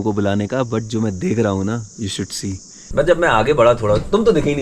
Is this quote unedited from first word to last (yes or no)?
no